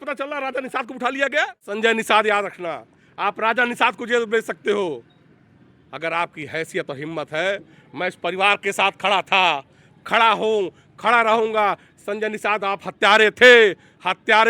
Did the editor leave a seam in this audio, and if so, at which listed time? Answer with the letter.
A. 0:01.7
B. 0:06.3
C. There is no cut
A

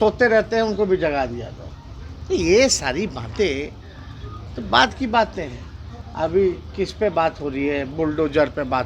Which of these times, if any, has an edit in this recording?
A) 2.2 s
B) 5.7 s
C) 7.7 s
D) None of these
D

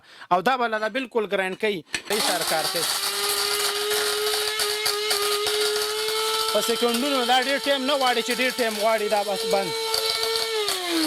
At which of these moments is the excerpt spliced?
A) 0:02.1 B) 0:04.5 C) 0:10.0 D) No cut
A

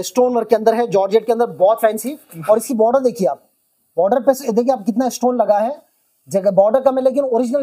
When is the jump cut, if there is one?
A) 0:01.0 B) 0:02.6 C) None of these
C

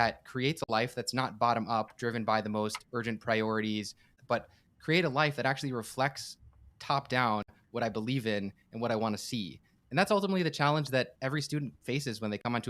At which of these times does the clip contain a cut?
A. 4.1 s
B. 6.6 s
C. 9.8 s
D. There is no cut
A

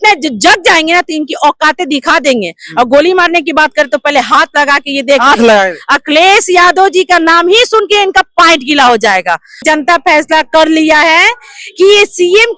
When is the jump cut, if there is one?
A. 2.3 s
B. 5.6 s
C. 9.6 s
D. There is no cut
C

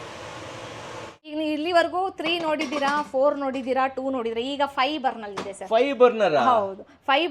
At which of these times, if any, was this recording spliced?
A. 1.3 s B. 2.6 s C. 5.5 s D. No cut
A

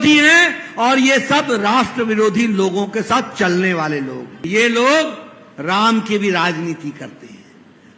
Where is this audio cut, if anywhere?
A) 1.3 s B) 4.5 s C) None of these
B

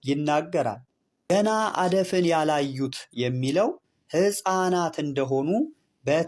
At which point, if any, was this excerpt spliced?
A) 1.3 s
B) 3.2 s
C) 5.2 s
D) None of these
A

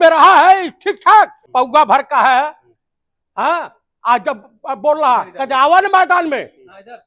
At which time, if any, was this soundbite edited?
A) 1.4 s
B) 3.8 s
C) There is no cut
A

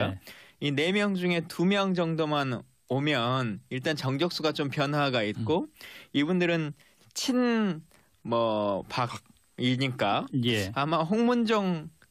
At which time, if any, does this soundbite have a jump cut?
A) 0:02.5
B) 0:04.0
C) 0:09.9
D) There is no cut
B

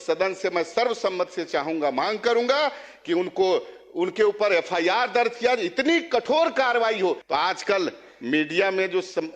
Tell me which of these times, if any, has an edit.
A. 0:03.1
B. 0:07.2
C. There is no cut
B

